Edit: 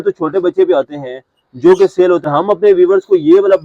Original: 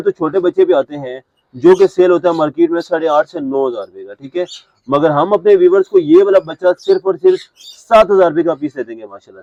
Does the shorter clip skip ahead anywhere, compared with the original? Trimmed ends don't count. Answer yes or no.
yes